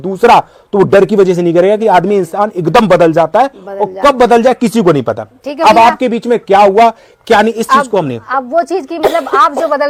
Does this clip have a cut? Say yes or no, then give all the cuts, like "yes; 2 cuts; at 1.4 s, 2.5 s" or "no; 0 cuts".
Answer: no; 0 cuts